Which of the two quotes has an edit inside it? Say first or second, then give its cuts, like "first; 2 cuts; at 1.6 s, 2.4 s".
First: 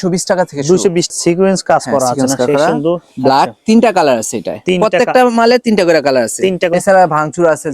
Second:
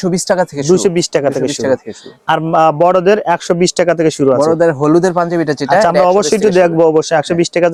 first; 2 cuts; at 1.1 s, 6.7 s